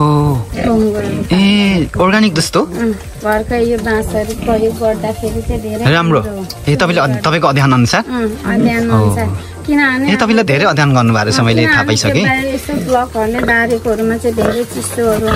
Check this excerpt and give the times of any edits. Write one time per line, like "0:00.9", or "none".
none